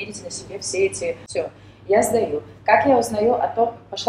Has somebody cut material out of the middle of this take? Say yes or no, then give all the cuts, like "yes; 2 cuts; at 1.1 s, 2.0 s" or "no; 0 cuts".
yes; 1 cut; at 1.2 s